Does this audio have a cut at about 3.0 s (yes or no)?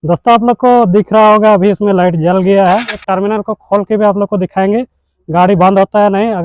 yes